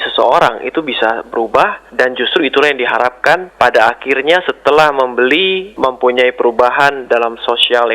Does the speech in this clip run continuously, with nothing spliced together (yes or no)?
no